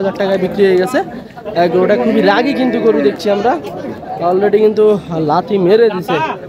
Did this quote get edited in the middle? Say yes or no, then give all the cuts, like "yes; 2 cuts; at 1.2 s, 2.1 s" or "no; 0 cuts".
no; 0 cuts